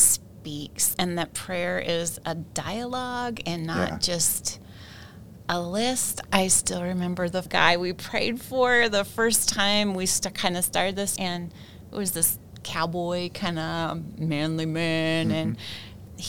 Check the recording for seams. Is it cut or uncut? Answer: cut